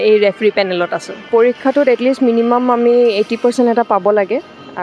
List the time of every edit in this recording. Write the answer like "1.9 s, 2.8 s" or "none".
1.3 s